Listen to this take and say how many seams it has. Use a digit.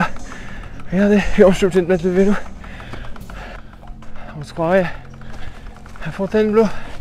1